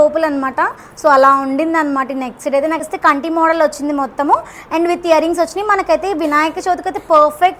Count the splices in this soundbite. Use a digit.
1